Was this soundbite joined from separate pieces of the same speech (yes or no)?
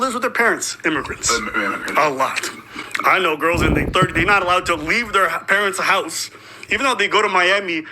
yes